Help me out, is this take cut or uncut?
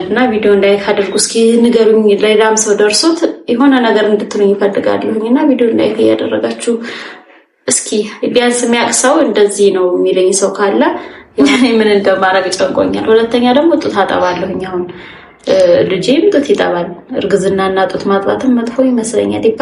cut